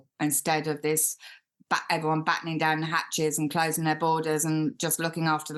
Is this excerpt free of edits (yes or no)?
yes